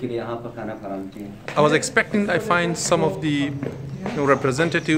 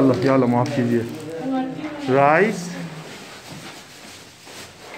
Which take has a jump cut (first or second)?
first